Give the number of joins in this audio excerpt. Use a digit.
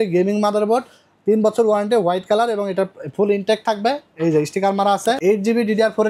1